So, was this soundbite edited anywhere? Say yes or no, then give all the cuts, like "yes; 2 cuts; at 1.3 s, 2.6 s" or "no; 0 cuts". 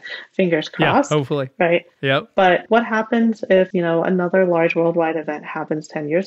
yes; 2 cuts; at 2.6 s, 3.7 s